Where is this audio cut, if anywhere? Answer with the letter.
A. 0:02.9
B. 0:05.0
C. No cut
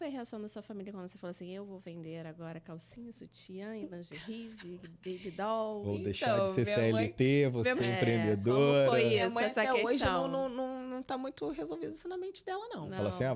C